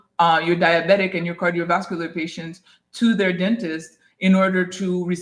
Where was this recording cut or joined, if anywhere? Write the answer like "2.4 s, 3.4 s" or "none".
none